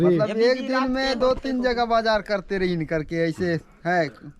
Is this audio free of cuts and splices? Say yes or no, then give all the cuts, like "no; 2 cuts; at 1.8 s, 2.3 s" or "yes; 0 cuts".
yes; 0 cuts